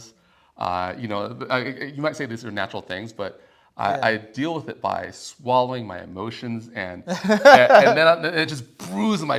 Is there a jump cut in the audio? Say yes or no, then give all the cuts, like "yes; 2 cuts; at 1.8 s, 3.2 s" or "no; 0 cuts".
no; 0 cuts